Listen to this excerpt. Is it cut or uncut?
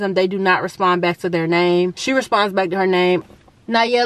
cut